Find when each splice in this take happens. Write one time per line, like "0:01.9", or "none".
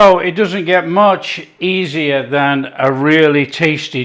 none